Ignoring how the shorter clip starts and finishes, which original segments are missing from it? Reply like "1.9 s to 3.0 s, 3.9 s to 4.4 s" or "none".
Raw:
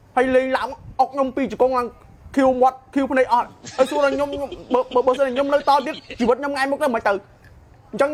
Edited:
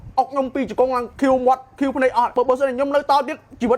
1.9 s to 2.2 s, 3.5 s to 4.9 s